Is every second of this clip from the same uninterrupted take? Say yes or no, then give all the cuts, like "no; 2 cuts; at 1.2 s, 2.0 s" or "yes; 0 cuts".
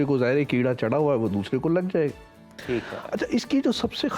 yes; 0 cuts